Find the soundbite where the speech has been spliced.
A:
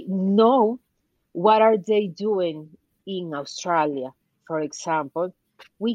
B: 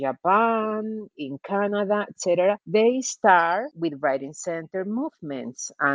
B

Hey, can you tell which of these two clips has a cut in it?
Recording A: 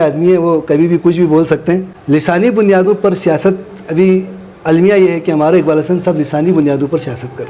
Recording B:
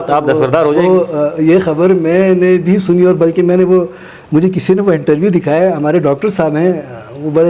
A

